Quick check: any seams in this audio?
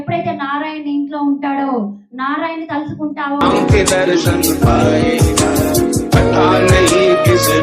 no; 0 cuts

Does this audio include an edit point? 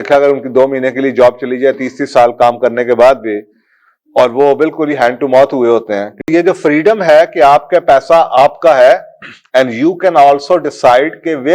yes; 1 cut; at 6.3 s

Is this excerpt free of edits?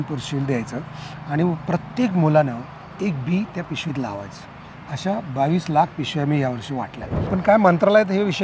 no; 1 cut; at 7.2 s

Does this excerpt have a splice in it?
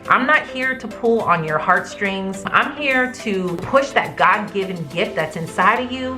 yes; 2 cuts; at 2.5 s, 3.6 s

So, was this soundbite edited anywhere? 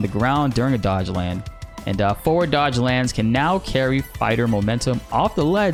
no; 0 cuts

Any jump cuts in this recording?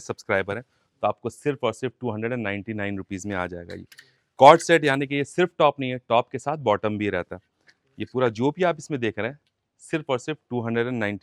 no; 0 cuts

